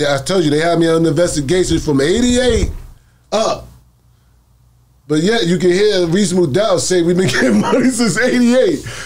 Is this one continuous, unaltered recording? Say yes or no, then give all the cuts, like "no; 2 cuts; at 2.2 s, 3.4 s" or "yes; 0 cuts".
yes; 0 cuts